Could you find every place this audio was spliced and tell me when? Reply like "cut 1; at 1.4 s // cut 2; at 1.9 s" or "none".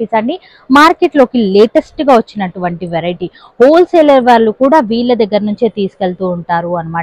none